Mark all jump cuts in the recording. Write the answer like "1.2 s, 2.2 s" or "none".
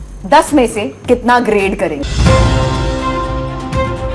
2.0 s